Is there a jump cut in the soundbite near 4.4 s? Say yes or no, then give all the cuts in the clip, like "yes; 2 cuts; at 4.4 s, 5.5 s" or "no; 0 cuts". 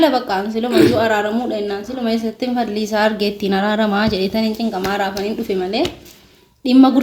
no; 0 cuts